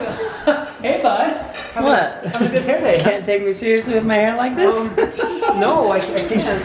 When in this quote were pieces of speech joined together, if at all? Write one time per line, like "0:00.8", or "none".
none